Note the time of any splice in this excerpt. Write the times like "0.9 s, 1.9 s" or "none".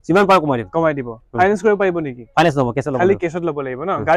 none